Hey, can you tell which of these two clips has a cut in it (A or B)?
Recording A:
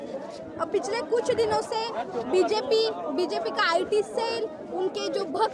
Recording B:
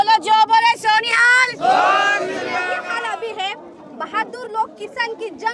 B